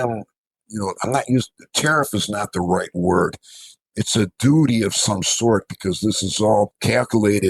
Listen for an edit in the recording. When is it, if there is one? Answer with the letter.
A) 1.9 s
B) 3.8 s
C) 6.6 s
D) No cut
B